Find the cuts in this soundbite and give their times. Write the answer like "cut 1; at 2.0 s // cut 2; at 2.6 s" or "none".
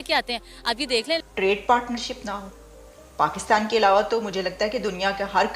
cut 1; at 1.2 s